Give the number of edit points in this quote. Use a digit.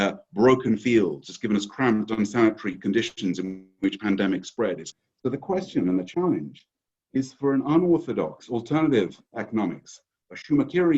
1